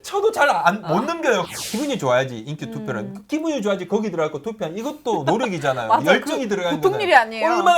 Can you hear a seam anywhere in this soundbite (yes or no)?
yes